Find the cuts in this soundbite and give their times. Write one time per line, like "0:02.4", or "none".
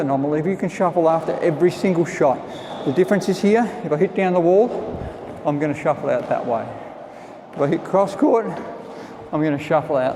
none